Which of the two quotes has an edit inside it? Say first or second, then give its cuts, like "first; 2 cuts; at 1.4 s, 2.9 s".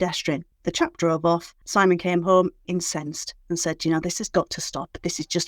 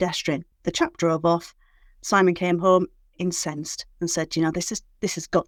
first; 3 cuts; at 1.6 s, 2.6 s, 4.2 s